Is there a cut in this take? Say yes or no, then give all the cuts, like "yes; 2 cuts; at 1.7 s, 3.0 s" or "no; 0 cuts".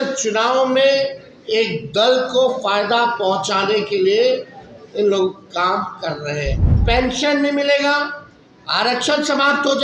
yes; 1 cut; at 6.7 s